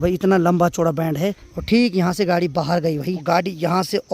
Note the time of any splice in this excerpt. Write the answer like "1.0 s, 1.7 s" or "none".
1.5 s, 3.1 s